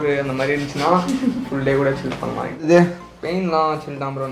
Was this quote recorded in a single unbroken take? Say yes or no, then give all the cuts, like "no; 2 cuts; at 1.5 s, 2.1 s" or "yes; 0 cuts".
no; 1 cut; at 2.6 s